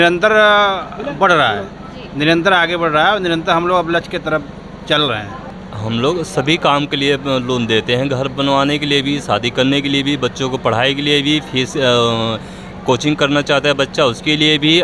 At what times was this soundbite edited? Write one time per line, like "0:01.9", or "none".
0:05.5